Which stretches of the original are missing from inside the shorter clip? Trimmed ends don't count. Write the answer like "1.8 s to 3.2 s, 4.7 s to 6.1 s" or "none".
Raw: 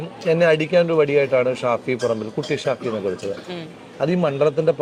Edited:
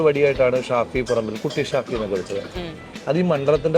none